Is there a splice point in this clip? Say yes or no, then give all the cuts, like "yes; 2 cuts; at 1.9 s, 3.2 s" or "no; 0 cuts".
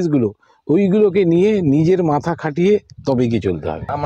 no; 0 cuts